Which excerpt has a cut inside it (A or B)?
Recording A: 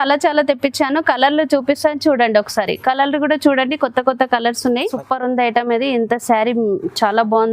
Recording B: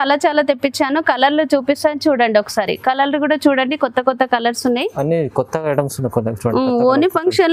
A